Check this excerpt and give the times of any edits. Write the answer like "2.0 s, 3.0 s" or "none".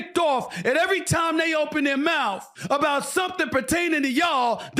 2.5 s